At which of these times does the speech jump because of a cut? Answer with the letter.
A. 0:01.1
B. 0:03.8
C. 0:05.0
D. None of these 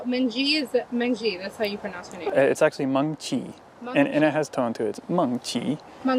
D